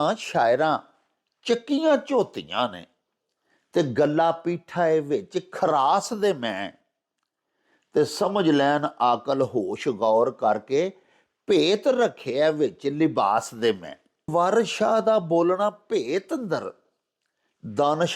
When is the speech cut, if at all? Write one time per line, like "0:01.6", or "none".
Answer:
0:14.3